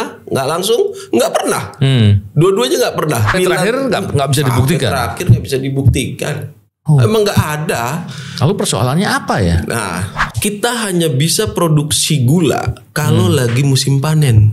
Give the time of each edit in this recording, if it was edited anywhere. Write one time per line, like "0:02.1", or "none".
0:03.3
0:10.2